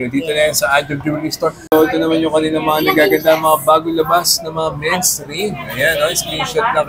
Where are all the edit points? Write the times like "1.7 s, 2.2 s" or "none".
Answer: 1.6 s